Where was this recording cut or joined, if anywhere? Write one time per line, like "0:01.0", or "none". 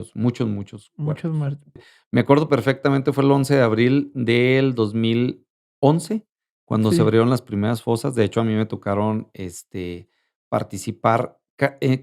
0:01.8